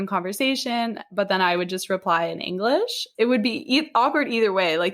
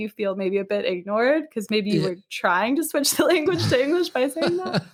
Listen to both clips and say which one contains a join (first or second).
first